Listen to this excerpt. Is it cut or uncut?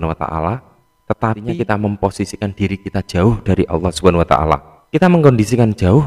cut